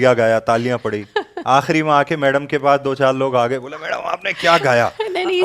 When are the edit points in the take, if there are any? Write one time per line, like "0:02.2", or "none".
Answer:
none